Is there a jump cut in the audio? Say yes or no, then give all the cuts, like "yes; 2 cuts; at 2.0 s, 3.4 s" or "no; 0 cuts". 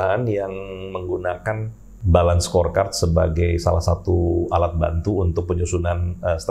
no; 0 cuts